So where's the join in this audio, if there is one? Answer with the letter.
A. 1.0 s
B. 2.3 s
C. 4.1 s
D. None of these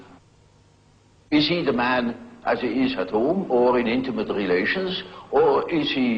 C